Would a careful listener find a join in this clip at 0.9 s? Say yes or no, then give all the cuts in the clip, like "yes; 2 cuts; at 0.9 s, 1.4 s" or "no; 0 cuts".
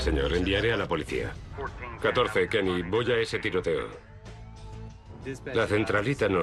yes; 1 cut; at 0.9 s